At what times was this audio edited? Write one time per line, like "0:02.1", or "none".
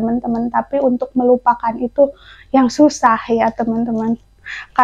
none